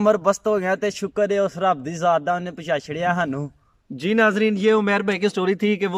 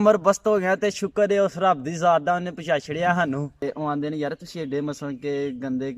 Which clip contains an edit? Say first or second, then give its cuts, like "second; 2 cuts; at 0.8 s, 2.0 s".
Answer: second; 1 cut; at 3.6 s